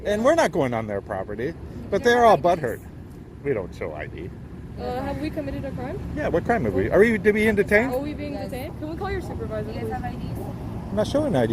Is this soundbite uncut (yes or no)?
no